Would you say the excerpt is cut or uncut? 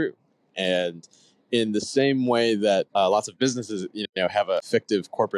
cut